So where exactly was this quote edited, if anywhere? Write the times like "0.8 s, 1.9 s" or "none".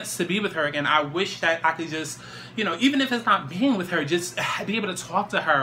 none